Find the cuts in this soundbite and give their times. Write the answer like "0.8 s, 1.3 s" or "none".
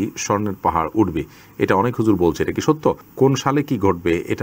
none